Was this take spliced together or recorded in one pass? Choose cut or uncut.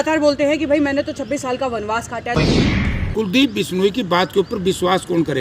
cut